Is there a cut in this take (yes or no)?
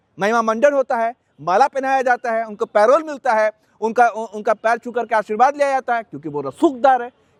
no